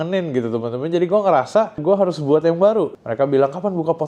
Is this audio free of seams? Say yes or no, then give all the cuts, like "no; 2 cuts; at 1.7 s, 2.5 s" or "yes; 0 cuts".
no; 2 cuts; at 1.8 s, 2.9 s